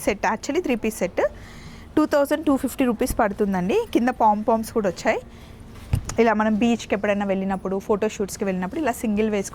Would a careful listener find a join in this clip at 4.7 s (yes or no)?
no